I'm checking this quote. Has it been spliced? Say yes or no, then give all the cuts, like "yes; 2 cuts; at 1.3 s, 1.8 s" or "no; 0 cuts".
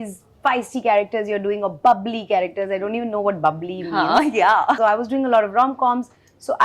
yes; 1 cut; at 4.8 s